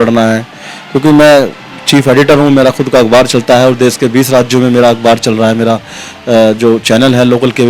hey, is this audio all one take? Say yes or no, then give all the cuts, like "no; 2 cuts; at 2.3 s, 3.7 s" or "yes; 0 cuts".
yes; 0 cuts